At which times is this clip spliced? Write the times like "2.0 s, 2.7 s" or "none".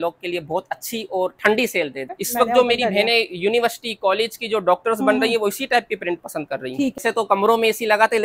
2.1 s, 7.0 s